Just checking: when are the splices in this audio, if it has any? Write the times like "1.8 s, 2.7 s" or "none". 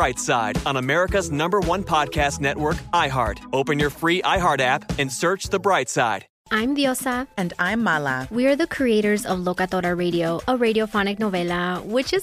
6.3 s